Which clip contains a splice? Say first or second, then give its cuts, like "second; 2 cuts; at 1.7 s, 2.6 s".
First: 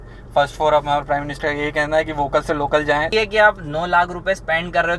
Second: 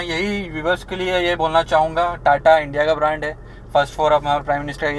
first; 1 cut; at 3.1 s